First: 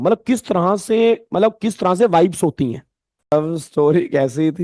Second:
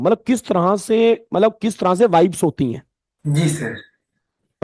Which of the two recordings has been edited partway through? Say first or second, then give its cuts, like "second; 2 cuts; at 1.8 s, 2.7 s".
first; 1 cut; at 3.3 s